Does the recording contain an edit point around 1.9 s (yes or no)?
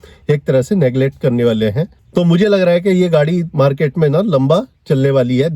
yes